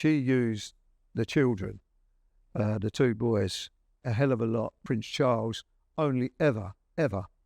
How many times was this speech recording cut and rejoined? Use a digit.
1